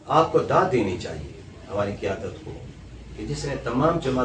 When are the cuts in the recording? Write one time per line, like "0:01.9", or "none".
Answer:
none